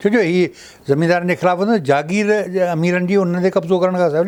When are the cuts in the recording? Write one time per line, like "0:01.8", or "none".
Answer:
none